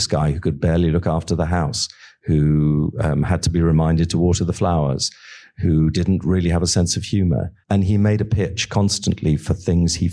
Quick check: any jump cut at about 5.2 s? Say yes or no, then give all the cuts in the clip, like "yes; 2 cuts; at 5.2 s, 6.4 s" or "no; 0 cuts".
no; 1 cut; at 7.5 s